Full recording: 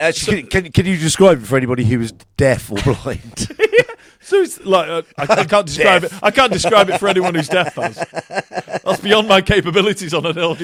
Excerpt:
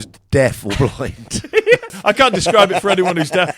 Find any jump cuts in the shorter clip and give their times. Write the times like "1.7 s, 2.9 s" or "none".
1.9 s